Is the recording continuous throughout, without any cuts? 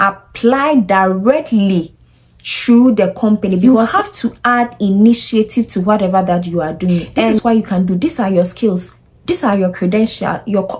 no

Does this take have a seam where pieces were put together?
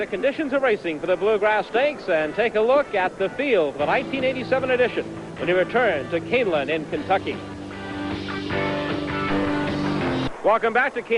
no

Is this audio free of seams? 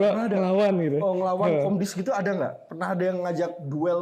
yes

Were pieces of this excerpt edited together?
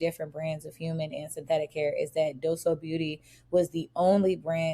no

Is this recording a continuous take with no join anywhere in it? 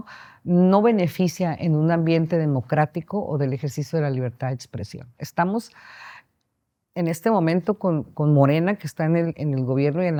yes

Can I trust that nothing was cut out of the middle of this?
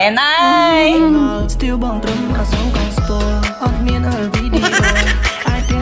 no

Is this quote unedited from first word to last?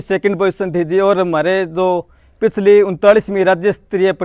yes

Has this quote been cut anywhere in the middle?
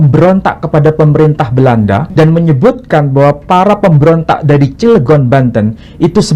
yes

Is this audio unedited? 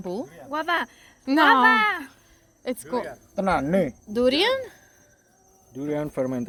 yes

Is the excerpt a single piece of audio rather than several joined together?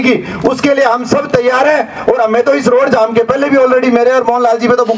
yes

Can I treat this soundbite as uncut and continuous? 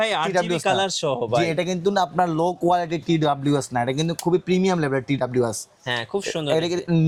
yes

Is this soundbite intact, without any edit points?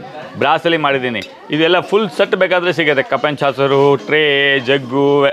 yes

